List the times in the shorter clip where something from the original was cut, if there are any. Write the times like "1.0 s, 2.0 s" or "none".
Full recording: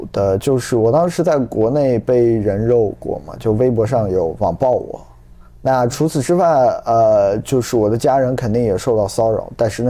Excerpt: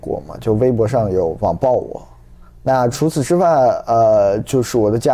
none